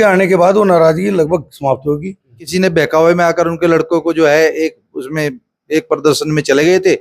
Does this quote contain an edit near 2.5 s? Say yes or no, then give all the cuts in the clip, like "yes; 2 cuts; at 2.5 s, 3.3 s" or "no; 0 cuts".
yes; 1 cut; at 2.5 s